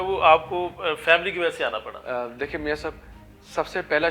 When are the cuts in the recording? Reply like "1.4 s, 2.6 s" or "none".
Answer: none